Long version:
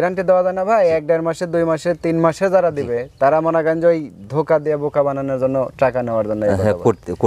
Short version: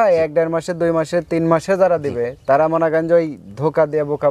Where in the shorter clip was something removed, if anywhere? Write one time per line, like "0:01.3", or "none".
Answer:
none